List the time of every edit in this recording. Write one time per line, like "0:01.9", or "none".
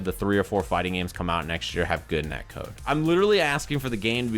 0:02.8